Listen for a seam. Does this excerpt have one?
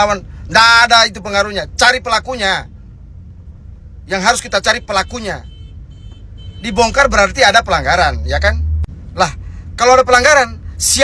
no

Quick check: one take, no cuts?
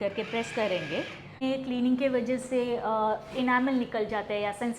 no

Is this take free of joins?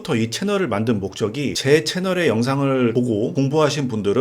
no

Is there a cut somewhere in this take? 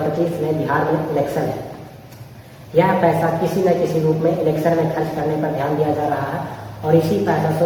no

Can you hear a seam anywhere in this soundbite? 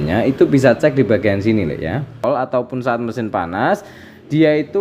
yes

